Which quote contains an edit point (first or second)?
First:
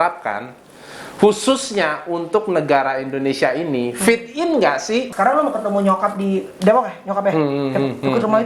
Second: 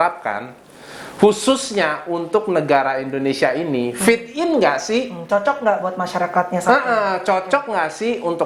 first